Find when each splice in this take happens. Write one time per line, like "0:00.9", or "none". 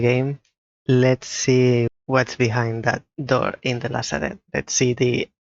0:01.9
0:03.1
0:04.4